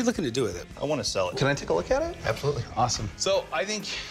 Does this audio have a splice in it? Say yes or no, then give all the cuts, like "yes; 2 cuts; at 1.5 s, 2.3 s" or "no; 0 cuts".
yes; 2 cuts; at 1.3 s, 3.0 s